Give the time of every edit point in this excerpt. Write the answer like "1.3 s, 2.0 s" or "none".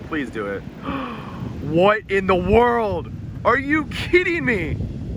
none